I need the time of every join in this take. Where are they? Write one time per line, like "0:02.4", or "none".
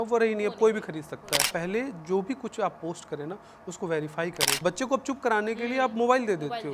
0:01.4
0:04.5